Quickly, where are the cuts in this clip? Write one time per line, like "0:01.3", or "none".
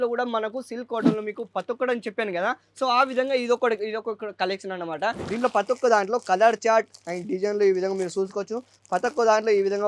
0:05.2